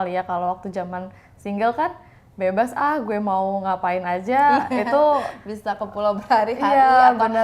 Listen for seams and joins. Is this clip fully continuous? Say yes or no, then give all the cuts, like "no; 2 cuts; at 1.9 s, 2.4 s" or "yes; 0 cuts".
yes; 0 cuts